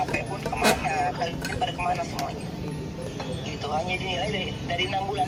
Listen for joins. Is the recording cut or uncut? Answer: uncut